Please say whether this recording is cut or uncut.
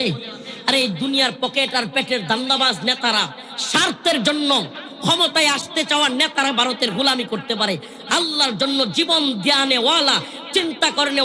uncut